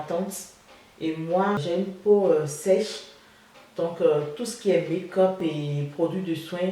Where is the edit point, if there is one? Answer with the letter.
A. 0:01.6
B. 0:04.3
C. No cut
A